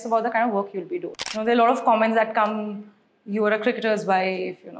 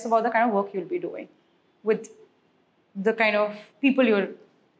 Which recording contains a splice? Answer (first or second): first